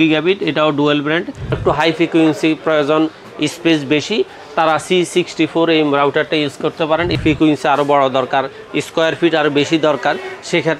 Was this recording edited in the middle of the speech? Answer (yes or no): yes